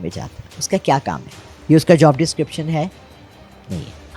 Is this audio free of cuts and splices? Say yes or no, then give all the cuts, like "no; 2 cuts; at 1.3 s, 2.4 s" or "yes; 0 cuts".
yes; 0 cuts